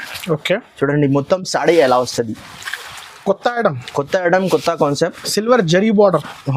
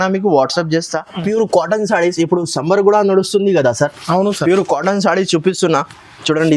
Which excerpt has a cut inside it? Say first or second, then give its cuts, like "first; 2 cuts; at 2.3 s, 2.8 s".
second; 1 cut; at 1.2 s